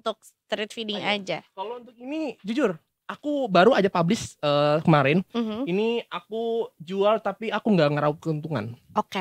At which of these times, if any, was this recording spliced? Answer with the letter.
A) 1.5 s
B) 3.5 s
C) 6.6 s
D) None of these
D